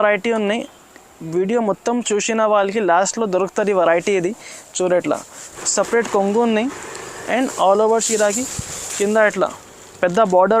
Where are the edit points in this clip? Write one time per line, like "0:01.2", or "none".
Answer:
0:05.6